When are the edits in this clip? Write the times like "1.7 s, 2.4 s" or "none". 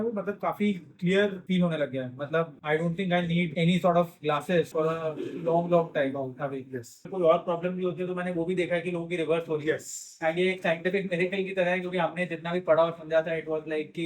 1.4 s, 2.6 s, 3.5 s, 4.7 s, 7.1 s